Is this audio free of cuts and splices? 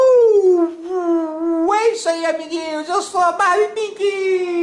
yes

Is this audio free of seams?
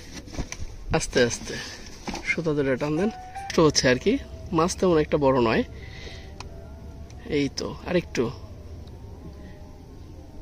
no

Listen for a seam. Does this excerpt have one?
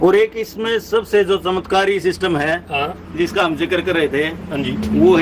no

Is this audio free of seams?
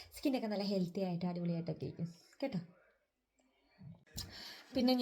no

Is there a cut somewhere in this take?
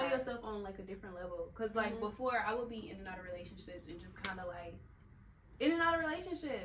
no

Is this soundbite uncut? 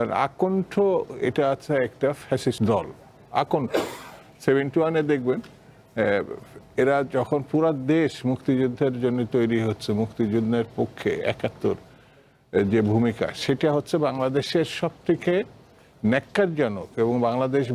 no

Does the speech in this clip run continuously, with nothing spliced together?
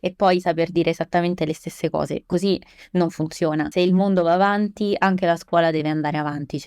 no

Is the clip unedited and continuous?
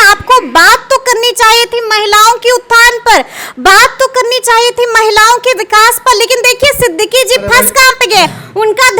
yes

